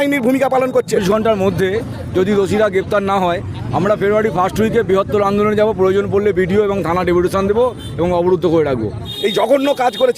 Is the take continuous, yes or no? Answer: no